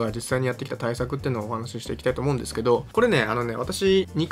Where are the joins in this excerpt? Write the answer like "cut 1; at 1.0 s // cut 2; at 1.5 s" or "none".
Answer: none